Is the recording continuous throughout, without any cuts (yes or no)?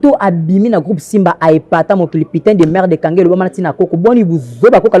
yes